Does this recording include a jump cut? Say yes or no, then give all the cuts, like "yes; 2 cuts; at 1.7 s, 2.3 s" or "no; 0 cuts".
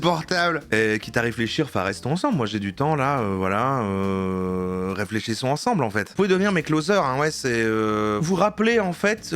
yes; 2 cuts; at 6.1 s, 8.2 s